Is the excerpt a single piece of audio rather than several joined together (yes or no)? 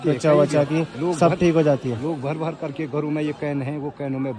yes